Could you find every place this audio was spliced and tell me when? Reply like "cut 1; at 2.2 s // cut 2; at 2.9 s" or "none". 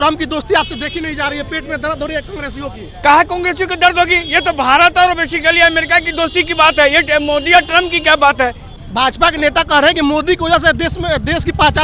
cut 1; at 8.6 s